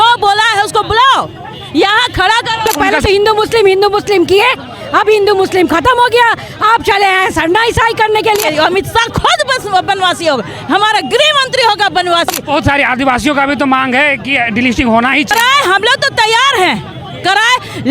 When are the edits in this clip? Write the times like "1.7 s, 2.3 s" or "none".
2.7 s, 8.5 s, 12.4 s, 15.3 s